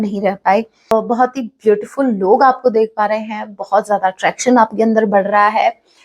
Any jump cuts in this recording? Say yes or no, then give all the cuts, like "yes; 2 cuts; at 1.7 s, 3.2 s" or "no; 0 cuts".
yes; 1 cut; at 0.9 s